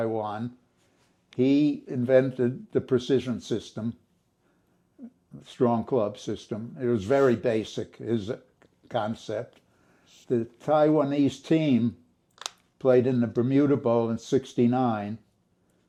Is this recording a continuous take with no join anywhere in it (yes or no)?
yes